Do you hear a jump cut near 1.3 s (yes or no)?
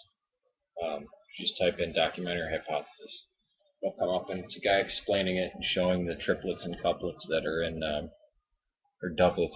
no